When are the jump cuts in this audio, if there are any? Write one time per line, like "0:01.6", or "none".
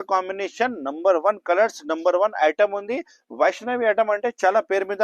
none